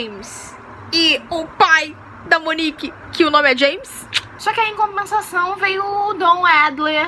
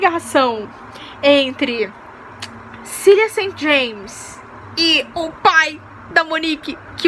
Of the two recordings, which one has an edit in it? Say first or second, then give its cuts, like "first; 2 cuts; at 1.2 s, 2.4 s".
first; 1 cut; at 4.3 s